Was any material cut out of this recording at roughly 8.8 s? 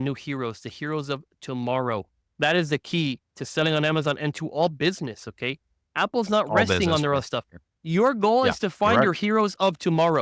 no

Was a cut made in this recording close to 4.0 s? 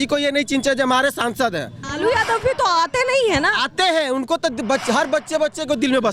no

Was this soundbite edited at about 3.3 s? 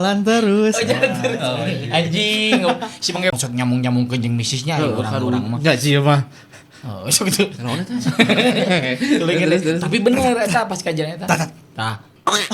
yes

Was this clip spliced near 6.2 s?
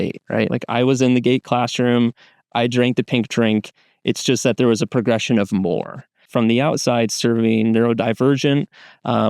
yes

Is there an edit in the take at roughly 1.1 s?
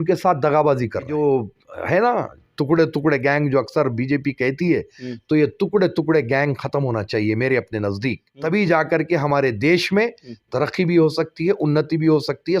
yes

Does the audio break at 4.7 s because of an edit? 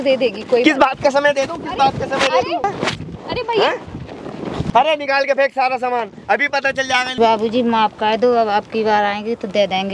yes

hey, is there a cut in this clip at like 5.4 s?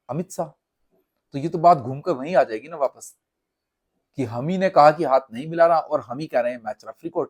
no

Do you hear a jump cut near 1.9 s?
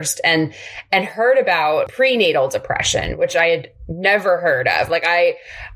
yes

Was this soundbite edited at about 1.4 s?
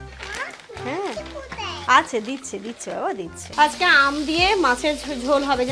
no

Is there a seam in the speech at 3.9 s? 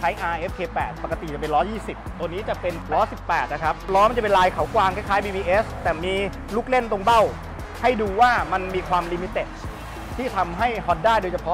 yes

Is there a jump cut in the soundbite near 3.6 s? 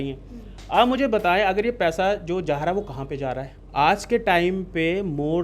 yes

